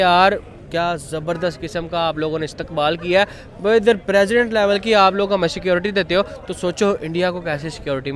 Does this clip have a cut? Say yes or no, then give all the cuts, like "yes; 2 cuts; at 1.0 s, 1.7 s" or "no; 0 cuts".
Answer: no; 0 cuts